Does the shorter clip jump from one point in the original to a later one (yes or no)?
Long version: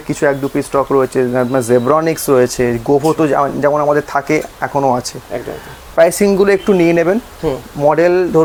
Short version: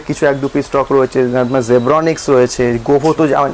no